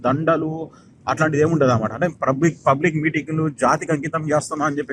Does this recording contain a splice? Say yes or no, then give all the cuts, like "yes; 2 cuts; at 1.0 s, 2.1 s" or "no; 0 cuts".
no; 0 cuts